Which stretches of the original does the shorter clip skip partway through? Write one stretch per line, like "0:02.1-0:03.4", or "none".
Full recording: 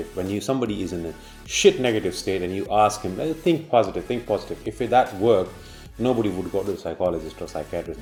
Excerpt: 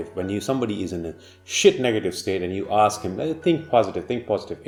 none